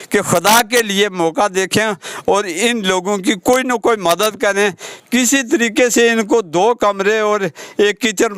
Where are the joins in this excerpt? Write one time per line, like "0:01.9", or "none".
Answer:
none

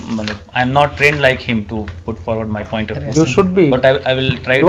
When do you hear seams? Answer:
none

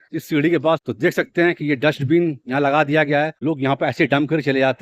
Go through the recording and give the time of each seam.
0:00.9
0:03.4

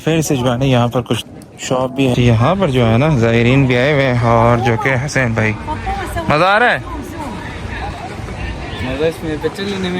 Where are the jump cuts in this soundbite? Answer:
0:02.1

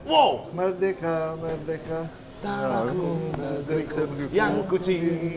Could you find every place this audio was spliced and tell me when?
none

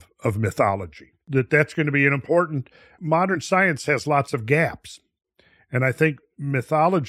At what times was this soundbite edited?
0:01.2
0:02.9

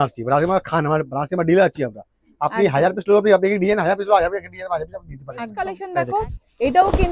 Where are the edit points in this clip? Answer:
0:05.6

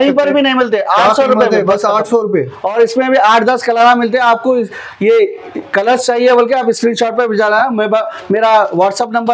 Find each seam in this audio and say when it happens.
none

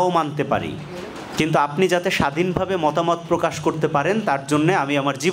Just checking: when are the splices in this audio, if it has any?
none

